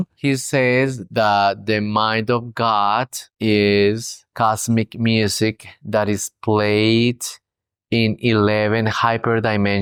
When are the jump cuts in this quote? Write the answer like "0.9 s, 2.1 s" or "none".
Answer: none